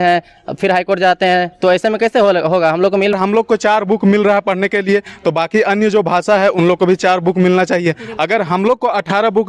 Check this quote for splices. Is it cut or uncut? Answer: cut